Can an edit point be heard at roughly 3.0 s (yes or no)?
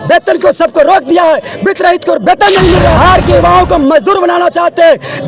yes